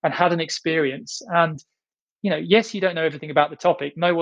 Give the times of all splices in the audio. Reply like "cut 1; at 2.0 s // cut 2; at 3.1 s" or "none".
cut 1; at 2.1 s